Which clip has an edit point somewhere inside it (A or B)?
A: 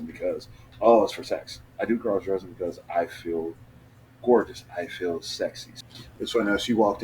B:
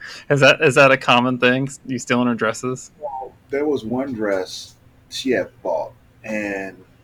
A